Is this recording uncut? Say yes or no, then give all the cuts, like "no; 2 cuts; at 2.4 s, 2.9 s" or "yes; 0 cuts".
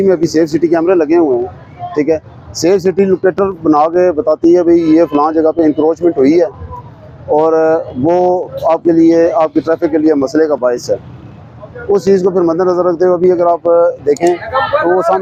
yes; 0 cuts